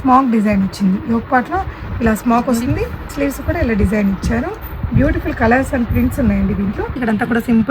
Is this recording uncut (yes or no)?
no